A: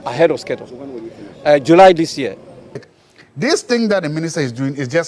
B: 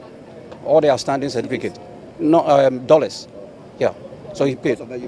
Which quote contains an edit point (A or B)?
A